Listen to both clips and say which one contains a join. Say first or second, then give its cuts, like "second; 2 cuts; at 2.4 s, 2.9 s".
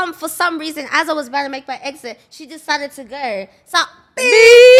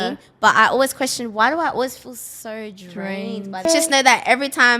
second; 1 cut; at 3.7 s